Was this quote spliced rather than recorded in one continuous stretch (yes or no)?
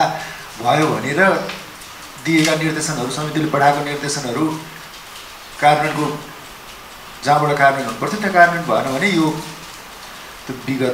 no